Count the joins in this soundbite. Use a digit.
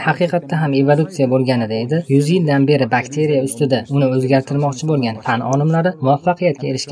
0